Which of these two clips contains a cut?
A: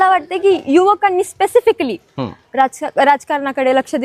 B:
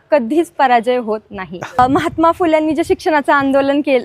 B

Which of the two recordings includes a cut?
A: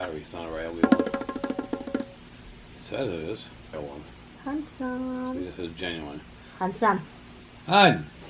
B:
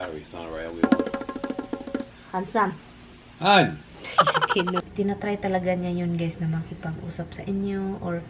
B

